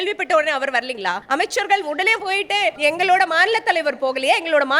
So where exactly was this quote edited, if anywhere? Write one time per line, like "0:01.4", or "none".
0:01.2
0:02.8